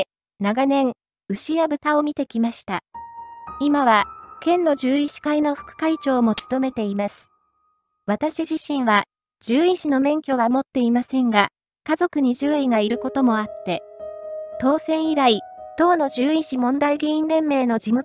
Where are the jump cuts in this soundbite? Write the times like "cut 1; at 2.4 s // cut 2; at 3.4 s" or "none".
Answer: cut 1; at 9.8 s